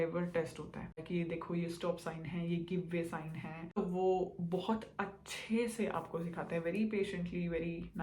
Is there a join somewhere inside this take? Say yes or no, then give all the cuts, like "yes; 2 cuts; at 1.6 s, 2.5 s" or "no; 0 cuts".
yes; 2 cuts; at 1.0 s, 3.8 s